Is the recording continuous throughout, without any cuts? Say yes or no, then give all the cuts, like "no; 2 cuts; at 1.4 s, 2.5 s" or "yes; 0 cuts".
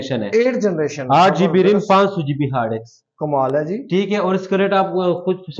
yes; 0 cuts